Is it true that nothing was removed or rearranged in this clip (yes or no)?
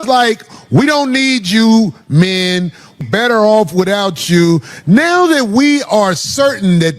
no